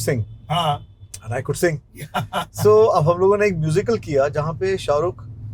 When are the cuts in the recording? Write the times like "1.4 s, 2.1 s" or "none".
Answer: none